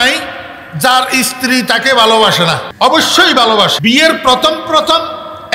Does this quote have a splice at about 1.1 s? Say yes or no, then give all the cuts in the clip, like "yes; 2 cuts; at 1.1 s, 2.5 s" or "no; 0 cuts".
no; 2 cuts; at 2.7 s, 3.8 s